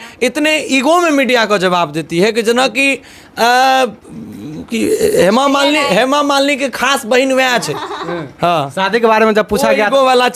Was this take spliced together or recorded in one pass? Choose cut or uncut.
uncut